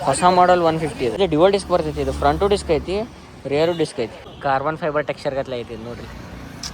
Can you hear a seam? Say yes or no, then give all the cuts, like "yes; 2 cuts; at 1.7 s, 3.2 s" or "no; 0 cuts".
yes; 2 cuts; at 1.1 s, 4.2 s